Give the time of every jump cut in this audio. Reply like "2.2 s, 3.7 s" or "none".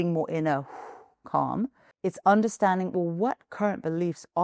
1.9 s

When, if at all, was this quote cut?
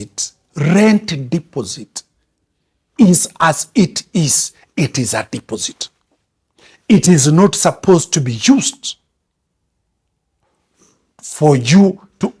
none

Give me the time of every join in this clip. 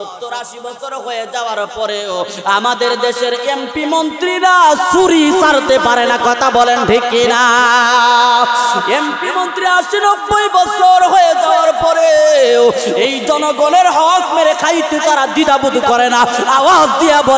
none

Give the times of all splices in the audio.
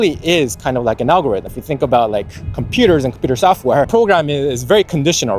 1.5 s, 3.9 s

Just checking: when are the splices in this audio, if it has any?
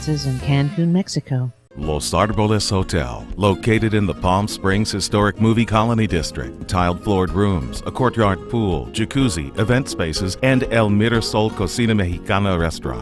1.6 s

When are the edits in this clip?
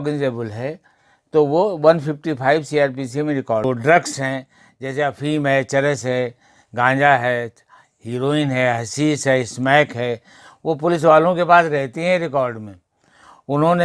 3.6 s

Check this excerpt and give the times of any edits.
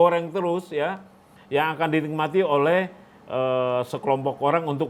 none

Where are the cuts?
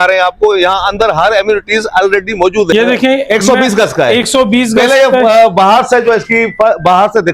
2.7 s

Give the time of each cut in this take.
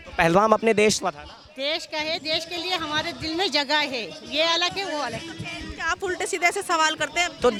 none

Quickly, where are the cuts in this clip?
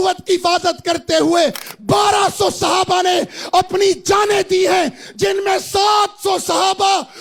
none

